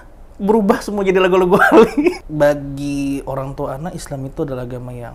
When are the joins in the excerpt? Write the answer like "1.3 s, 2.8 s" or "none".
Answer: 2.2 s